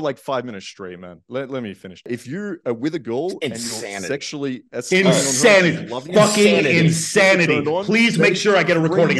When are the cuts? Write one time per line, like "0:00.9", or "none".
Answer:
0:02.1